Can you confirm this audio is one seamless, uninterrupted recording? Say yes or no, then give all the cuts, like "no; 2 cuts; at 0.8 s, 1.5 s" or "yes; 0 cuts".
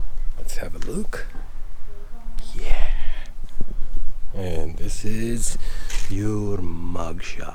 yes; 0 cuts